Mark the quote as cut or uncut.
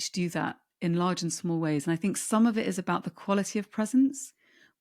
uncut